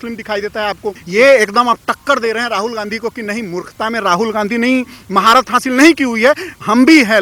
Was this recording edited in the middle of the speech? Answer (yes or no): yes